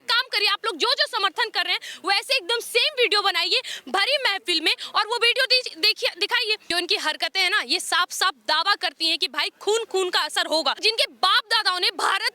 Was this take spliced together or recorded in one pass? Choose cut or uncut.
cut